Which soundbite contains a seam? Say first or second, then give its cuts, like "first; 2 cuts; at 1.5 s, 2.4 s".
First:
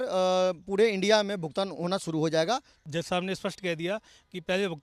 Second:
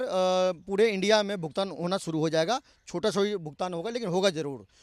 first; 1 cut; at 2.8 s